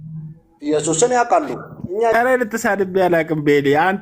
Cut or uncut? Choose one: cut